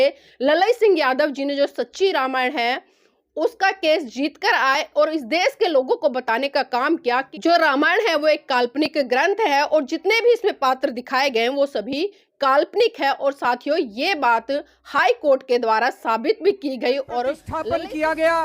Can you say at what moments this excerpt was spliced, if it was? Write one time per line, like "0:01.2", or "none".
0:07.3
0:17.2